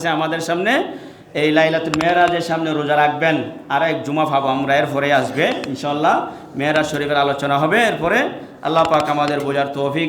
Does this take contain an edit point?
no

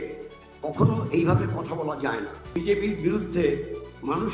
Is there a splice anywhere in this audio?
yes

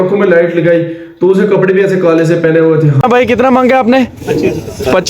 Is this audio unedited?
no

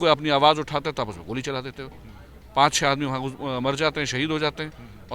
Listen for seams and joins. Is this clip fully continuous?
yes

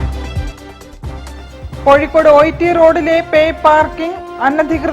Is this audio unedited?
no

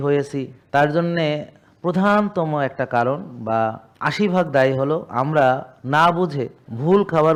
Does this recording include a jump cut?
no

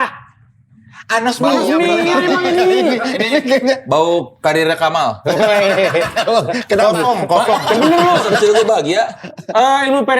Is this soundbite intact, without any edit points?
no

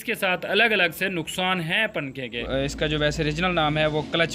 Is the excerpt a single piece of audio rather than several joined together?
no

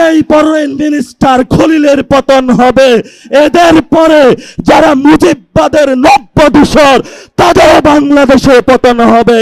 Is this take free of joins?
yes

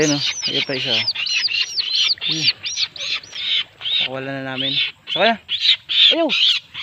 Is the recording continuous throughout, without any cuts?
yes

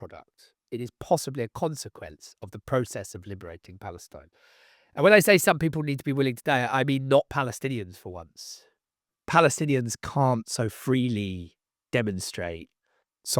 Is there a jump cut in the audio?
yes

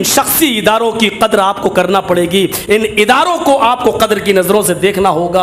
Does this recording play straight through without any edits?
yes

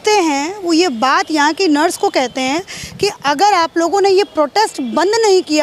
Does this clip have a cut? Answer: no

